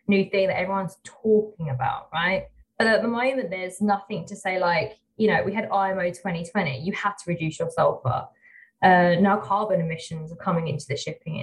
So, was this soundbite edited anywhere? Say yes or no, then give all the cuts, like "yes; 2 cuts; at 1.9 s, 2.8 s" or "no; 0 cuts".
yes; 1 cut; at 2.6 s